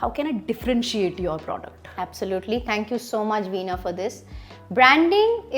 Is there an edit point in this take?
no; 0 cuts

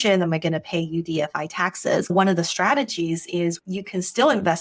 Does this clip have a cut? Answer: yes; 1 cut; at 2.1 s

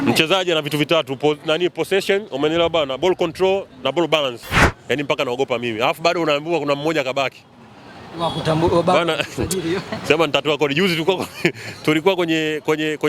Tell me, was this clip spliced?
yes; 1 cut; at 4.7 s

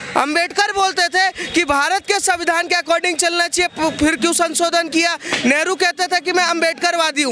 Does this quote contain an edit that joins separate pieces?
no; 0 cuts

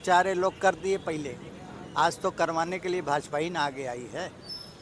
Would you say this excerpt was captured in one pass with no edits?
yes; 0 cuts

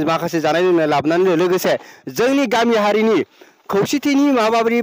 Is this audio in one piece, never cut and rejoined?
yes; 0 cuts

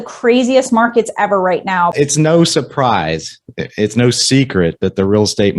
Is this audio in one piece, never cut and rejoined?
no; 1 cut; at 1.9 s

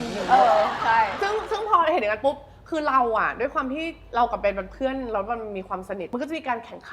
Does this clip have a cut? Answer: no; 0 cuts

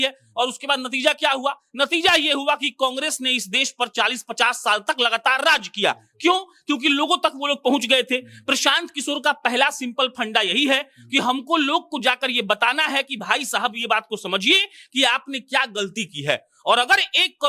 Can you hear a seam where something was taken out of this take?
no; 0 cuts

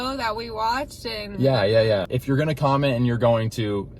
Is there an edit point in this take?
yes; 1 cut; at 2.1 s

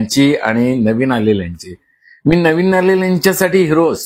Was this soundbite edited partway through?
no; 0 cuts

